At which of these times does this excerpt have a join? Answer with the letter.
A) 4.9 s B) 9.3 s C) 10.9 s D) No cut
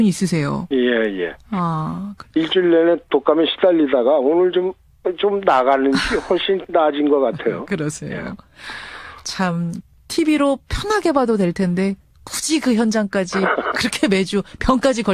D